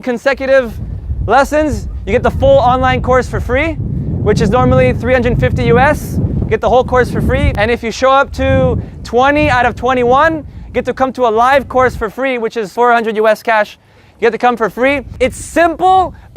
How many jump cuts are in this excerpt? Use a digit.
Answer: 1